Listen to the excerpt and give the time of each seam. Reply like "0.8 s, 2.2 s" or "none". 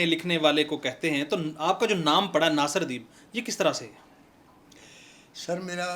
none